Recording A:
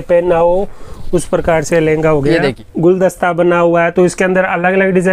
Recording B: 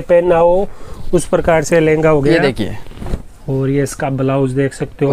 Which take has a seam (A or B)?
A